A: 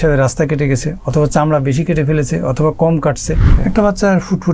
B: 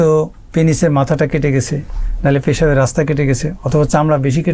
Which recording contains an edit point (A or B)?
A